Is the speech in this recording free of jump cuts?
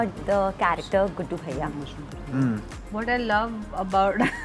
no; 1 cut; at 2.7 s

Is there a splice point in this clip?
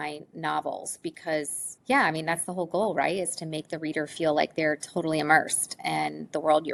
no; 0 cuts

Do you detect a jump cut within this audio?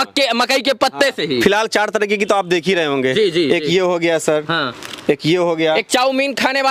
no; 0 cuts

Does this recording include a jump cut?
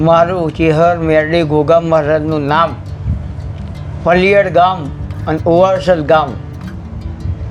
no; 0 cuts

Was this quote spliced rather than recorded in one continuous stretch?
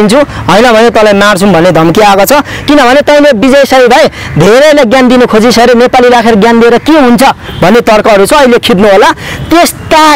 no; 0 cuts

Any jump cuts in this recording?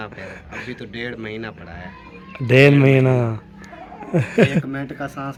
no; 0 cuts

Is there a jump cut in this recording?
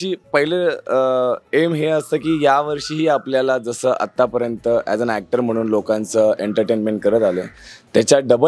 no; 0 cuts

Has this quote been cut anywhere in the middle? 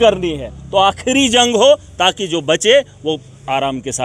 no; 0 cuts

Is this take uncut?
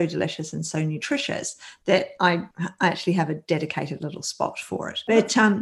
yes; 0 cuts

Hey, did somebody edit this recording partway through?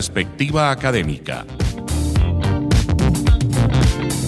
yes; 1 cut; at 1.6 s

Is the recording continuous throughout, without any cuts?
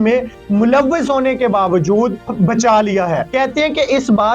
no; 2 cuts; at 2.2 s, 3.3 s

